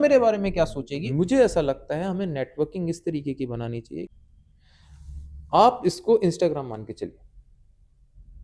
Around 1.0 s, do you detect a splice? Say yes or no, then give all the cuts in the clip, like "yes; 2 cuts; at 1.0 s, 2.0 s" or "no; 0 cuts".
yes; 2 cuts; at 1.0 s, 4.1 s